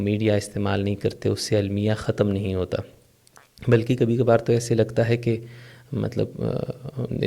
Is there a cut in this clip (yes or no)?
no